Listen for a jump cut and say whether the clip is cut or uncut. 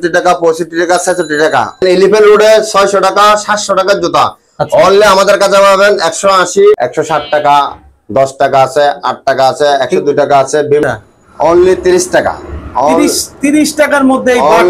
cut